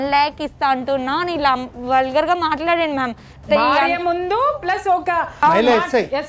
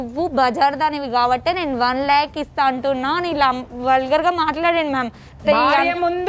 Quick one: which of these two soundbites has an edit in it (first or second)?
first